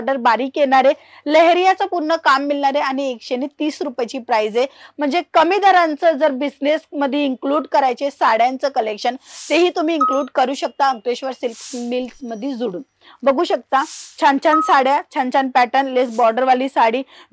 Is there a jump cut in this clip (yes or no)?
no